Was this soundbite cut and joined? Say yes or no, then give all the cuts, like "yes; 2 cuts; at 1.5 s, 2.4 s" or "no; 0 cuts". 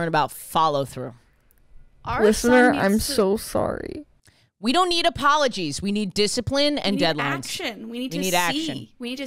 yes; 1 cut; at 4.5 s